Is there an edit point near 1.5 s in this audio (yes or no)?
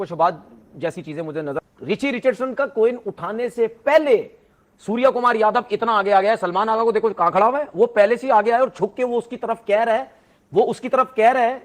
yes